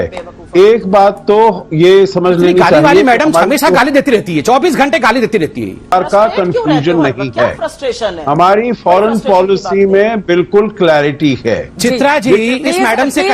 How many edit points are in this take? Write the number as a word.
one